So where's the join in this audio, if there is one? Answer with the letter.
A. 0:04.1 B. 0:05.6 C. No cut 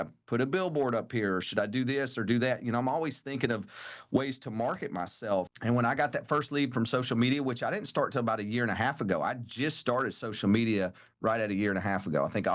B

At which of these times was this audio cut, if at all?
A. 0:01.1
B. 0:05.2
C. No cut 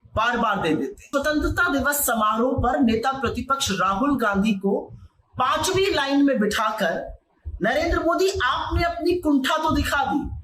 A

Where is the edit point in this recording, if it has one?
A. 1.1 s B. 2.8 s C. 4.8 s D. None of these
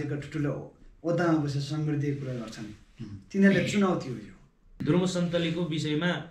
C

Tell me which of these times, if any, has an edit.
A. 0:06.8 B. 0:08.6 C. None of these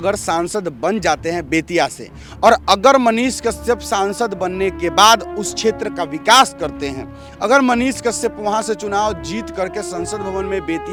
C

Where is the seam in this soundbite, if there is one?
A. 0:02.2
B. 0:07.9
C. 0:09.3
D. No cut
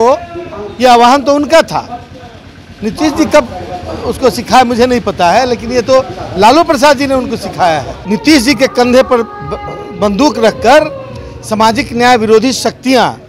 B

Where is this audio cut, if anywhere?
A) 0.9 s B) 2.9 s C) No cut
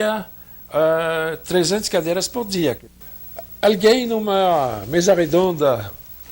B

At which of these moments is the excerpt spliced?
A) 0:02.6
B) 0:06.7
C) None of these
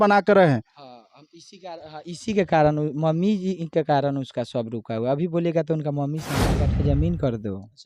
B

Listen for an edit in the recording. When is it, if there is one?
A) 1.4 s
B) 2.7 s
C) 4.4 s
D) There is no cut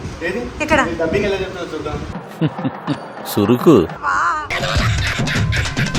D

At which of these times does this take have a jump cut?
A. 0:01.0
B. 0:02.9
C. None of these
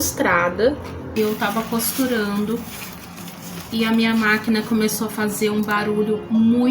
A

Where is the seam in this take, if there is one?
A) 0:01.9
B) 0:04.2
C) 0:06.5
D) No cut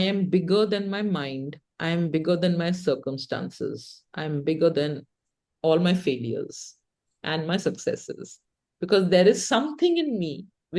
D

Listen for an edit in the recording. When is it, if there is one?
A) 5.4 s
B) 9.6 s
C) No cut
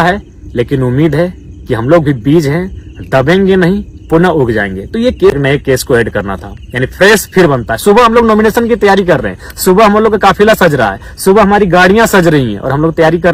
A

